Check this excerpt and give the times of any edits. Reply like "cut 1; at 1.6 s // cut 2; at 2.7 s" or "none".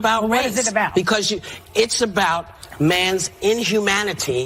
none

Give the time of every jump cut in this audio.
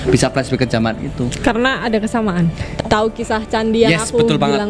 cut 1; at 2.7 s

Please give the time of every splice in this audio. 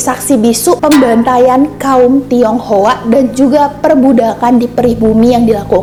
none

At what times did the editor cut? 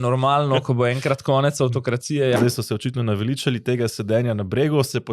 cut 1; at 2.4 s

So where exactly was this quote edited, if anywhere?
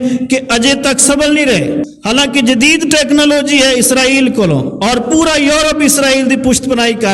cut 1; at 1.9 s

